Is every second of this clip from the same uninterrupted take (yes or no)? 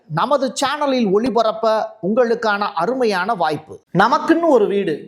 no